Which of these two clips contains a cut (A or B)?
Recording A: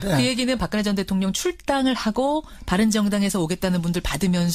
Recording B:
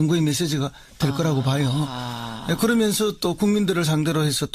A